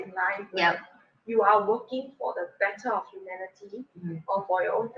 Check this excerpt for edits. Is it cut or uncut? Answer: uncut